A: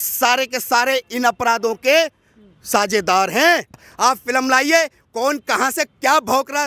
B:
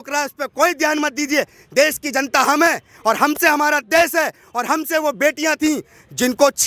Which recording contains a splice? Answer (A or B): A